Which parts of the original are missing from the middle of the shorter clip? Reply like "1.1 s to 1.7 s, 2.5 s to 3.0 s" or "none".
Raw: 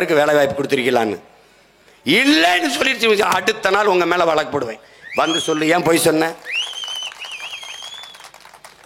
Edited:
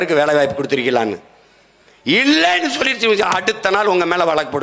none